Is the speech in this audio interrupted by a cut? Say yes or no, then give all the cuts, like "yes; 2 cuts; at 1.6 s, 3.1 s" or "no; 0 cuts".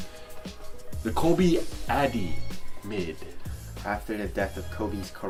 no; 0 cuts